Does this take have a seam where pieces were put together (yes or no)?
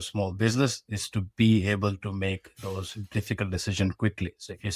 no